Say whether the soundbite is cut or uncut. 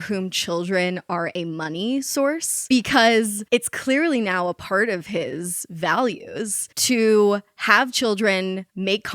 cut